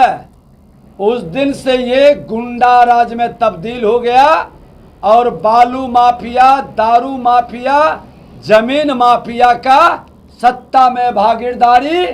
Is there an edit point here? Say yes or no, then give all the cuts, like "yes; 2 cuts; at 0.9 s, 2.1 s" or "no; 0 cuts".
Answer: no; 0 cuts